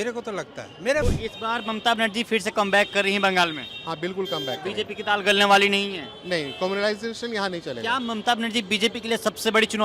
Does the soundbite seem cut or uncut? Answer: cut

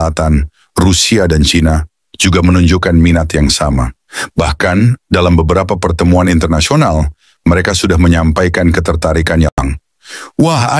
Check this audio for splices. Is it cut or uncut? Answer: cut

